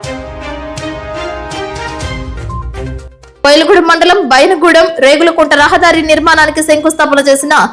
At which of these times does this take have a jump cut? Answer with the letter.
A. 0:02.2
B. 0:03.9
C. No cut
A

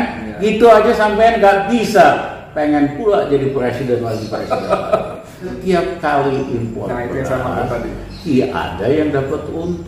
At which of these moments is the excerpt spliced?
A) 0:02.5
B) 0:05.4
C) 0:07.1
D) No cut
B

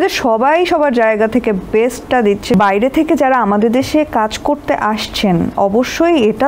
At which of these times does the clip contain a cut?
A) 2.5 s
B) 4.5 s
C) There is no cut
A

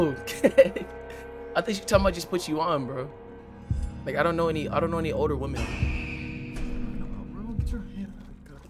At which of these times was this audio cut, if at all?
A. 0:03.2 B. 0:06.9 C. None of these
C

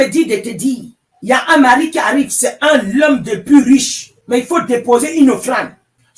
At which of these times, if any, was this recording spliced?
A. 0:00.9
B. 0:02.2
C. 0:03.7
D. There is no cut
C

